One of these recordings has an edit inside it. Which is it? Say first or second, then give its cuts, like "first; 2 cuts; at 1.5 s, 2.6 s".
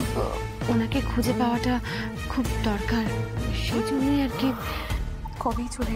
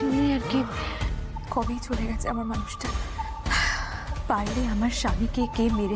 second; 1 cut; at 4.1 s